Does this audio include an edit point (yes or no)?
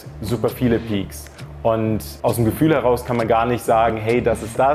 no